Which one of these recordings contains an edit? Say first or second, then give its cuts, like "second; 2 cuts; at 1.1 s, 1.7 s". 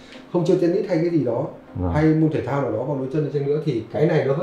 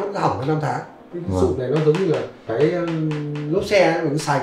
second; 1 cut; at 1.1 s